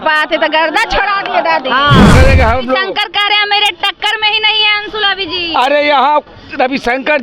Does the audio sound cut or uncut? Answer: cut